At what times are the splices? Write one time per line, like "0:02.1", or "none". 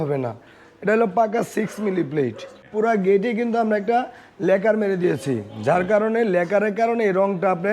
0:02.6

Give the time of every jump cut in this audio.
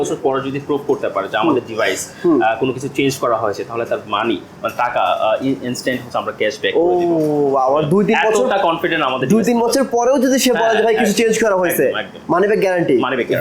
none

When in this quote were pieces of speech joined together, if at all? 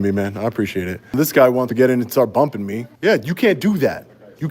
0:01.1
0:02.8

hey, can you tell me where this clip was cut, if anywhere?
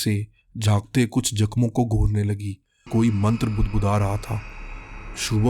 0:02.9

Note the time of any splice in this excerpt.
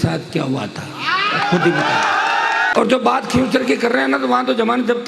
0:02.7

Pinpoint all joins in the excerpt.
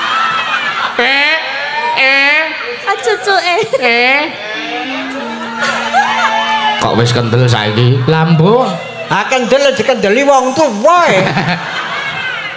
none

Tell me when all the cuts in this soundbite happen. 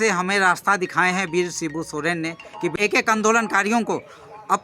0:02.8

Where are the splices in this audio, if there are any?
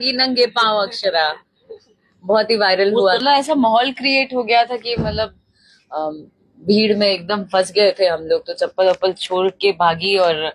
0:03.2

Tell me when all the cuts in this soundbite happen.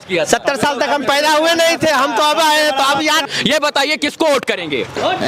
0:03.2

